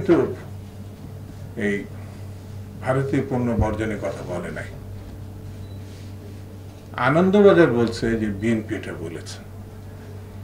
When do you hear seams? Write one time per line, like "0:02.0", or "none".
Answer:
none